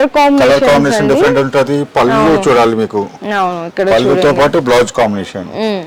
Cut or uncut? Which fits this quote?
uncut